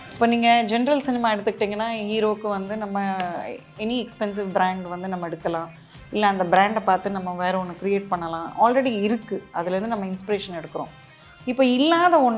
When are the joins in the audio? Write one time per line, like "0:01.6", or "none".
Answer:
none